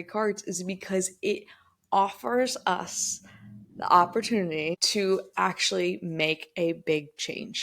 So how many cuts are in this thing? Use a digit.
1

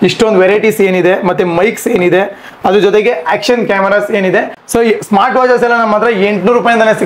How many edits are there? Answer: 1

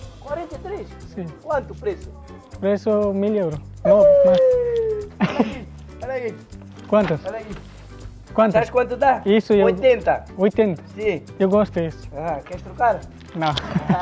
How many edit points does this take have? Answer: 0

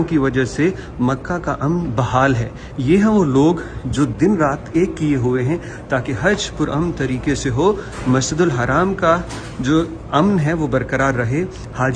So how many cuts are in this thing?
0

